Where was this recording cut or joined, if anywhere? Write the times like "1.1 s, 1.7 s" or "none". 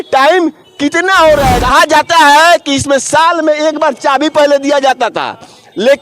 1.6 s